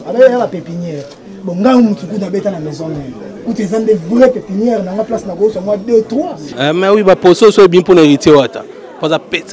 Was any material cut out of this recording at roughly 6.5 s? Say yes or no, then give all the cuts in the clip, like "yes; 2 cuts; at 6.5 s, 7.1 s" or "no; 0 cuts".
yes; 1 cut; at 6.5 s